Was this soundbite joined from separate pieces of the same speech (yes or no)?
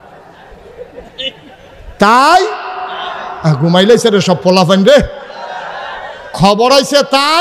no